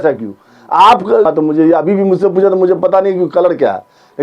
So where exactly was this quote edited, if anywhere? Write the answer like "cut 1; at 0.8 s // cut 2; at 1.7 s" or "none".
cut 1; at 1.3 s